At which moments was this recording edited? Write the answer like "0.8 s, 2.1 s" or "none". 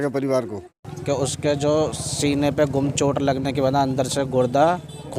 0.9 s